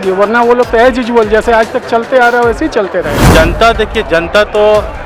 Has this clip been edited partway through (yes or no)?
yes